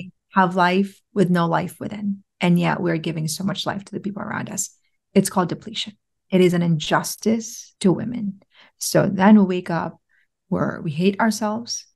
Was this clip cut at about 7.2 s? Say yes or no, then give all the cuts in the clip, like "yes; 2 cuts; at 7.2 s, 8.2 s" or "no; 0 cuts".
yes; 1 cut; at 7.2 s